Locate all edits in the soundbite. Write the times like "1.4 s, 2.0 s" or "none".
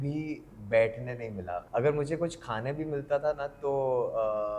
1.6 s